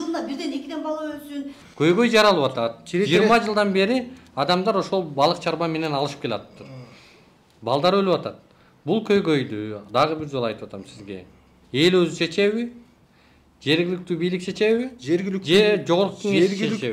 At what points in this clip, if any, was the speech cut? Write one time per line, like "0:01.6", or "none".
0:01.6